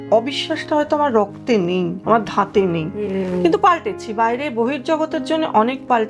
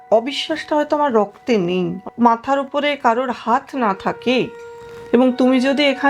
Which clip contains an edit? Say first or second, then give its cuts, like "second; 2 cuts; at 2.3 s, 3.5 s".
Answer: second; 1 cut; at 2.0 s